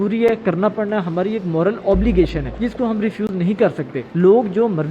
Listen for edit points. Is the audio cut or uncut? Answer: cut